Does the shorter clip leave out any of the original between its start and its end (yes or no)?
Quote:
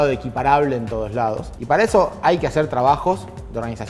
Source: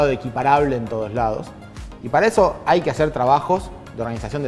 yes